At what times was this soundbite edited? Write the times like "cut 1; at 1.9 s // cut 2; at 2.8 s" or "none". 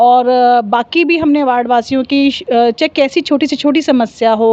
none

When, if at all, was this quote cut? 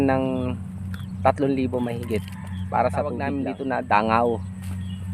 cut 1; at 3.3 s

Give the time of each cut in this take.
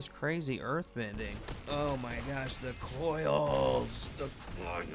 cut 1; at 1.5 s

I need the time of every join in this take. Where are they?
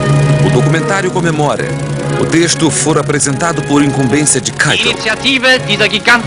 cut 1; at 2.5 s

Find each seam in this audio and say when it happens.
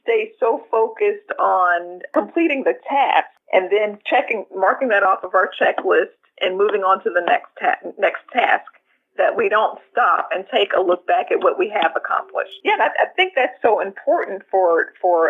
cut 1; at 2.0 s // cut 2; at 3.4 s

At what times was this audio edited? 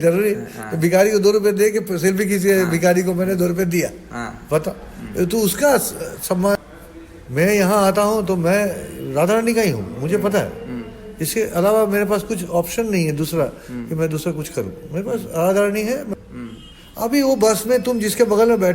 cut 1; at 6.6 s // cut 2; at 16.1 s

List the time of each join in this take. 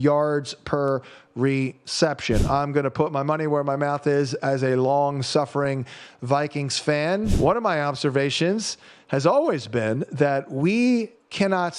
cut 1; at 7.3 s

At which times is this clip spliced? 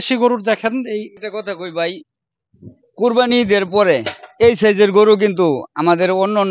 cut 1; at 1.1 s

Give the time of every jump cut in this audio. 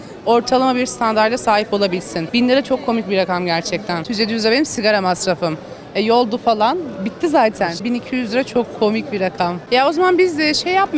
cut 1; at 2.2 s // cut 2; at 4.1 s // cut 3; at 7.8 s // cut 4; at 9.6 s

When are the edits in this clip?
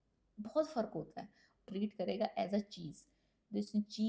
cut 1; at 1.7 s

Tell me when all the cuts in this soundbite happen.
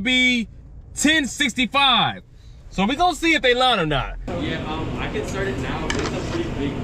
cut 1; at 4.2 s

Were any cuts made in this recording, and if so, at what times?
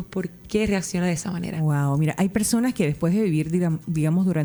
none

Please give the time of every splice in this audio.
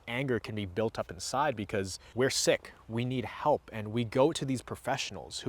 cut 1; at 2.0 s

